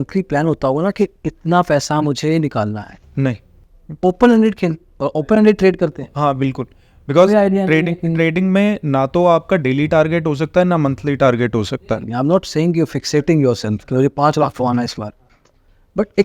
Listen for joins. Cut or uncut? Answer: uncut